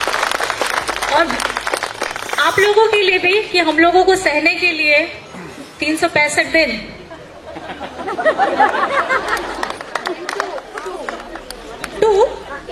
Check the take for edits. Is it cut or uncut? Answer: uncut